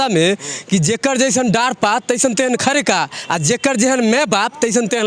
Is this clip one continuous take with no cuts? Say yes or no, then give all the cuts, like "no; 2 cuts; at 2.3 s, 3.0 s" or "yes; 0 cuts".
yes; 0 cuts